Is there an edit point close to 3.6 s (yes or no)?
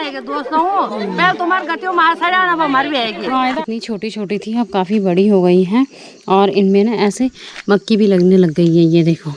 yes